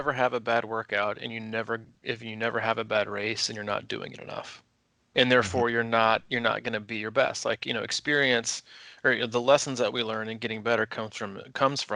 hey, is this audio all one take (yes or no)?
yes